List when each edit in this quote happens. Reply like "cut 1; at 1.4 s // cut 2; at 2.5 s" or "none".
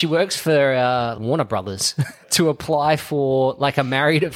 none